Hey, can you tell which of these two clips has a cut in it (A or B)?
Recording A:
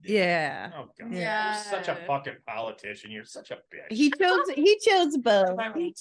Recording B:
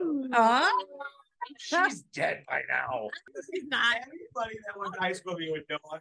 B